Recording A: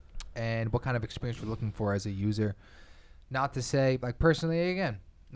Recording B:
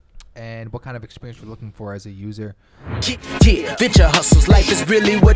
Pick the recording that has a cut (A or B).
B